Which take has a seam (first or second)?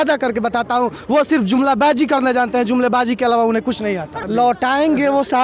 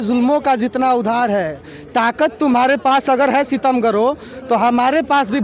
first